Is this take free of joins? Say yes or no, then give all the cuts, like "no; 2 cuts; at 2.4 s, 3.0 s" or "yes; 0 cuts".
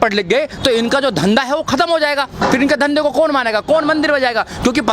yes; 0 cuts